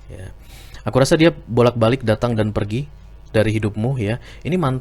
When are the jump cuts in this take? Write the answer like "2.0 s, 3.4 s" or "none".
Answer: none